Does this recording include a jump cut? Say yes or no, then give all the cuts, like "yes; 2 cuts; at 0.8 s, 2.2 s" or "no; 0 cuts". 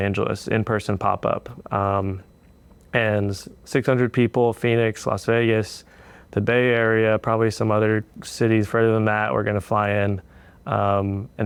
no; 0 cuts